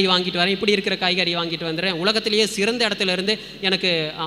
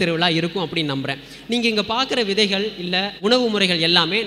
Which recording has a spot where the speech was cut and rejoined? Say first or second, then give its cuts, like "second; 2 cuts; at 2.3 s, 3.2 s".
second; 1 cut; at 3.2 s